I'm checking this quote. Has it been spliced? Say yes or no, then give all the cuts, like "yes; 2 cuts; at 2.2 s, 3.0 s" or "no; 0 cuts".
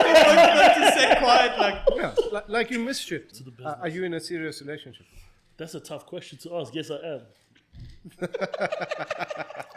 yes; 1 cut; at 3.3 s